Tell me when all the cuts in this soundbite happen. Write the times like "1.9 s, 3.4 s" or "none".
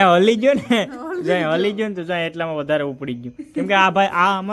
none